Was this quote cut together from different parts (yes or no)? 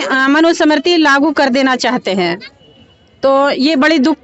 no